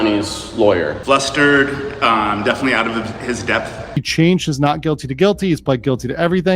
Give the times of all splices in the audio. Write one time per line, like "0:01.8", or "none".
0:04.0